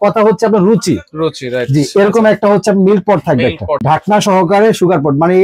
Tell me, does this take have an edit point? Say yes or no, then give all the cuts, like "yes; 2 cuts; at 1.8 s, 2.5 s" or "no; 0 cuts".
yes; 1 cut; at 3.8 s